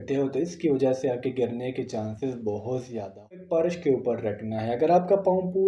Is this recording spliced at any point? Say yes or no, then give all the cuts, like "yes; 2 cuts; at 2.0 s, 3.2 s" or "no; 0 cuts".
yes; 1 cut; at 3.4 s